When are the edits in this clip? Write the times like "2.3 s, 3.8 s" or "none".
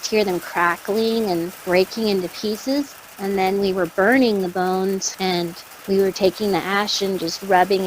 1.5 s, 3.0 s, 5.3 s